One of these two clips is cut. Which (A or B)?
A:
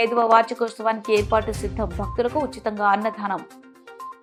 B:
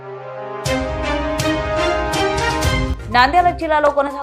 B